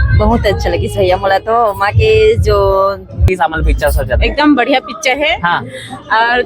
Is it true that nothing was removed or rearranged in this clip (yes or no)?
no